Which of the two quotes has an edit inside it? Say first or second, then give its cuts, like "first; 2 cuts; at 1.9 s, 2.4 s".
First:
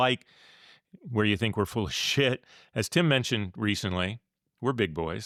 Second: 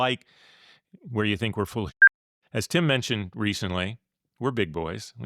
second; 1 cut; at 2.1 s